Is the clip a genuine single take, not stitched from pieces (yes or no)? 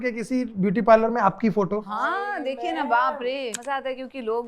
no